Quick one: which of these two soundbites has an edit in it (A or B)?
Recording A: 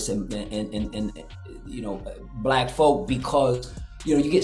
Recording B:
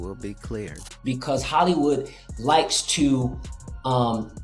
B